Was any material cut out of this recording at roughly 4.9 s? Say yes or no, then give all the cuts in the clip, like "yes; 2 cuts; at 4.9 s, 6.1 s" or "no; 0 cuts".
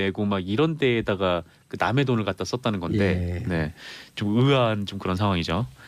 yes; 1 cut; at 4.9 s